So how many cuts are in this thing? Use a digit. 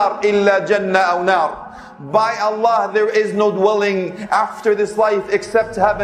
0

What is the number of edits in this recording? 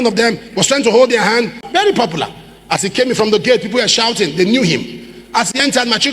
1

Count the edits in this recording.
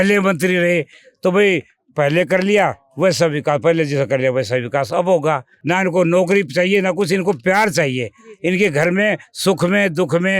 1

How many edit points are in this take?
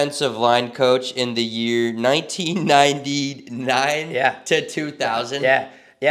0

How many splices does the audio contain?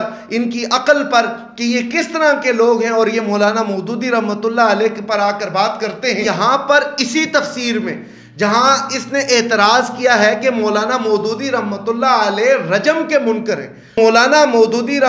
2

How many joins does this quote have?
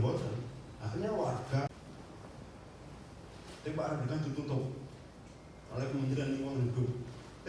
1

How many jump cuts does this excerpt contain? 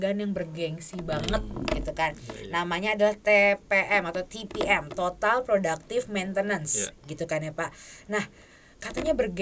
0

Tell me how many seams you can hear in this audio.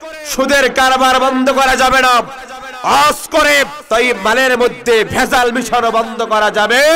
1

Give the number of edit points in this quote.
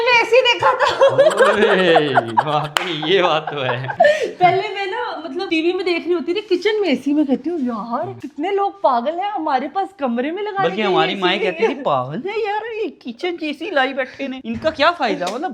0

